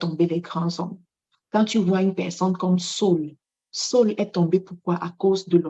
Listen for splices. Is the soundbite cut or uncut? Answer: uncut